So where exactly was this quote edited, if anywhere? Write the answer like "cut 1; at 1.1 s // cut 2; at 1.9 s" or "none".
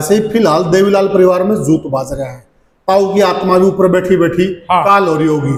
none